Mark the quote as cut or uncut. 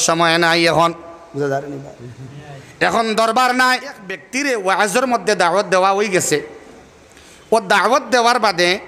cut